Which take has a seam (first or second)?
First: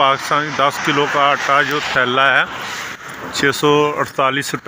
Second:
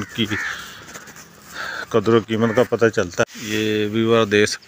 second